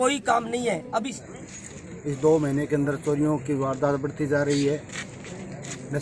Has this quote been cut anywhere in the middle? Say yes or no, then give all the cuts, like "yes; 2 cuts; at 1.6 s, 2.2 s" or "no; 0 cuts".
yes; 1 cut; at 1.2 s